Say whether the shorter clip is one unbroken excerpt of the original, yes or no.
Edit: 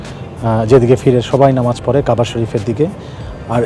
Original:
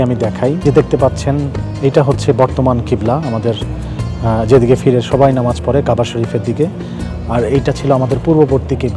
yes